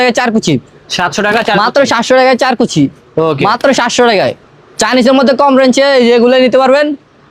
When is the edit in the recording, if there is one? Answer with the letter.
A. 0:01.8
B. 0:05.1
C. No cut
C